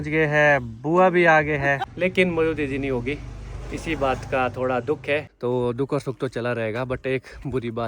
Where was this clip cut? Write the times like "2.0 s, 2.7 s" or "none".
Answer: 1.8 s, 5.3 s